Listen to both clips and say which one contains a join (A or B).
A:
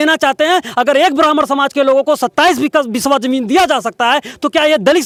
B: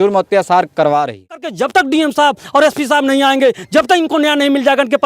B